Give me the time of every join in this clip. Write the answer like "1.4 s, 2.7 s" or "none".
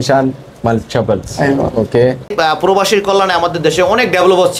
2.3 s